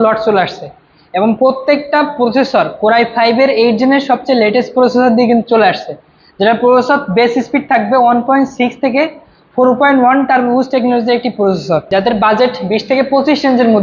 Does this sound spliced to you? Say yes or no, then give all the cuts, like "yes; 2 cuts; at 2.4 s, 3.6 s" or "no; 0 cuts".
yes; 1 cut; at 11.8 s